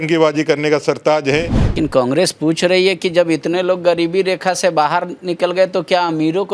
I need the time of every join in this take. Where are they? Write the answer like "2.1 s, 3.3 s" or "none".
1.6 s